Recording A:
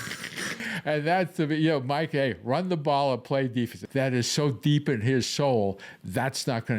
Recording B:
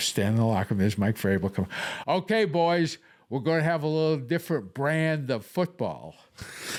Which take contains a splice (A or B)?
A